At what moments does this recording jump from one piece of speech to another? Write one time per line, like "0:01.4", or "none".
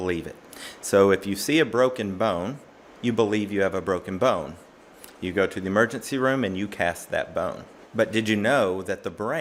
none